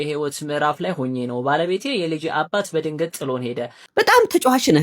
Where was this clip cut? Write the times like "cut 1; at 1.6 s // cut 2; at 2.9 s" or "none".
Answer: cut 1; at 3.8 s